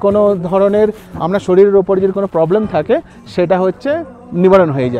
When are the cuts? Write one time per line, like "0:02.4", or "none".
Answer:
none